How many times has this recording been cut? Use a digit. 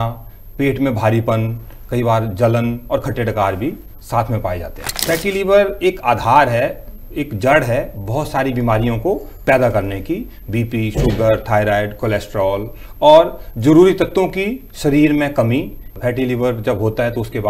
2